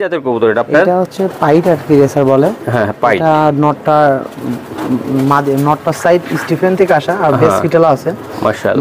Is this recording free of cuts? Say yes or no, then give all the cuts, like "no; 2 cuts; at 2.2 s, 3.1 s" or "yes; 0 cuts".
yes; 0 cuts